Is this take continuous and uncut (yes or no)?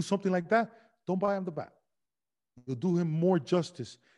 yes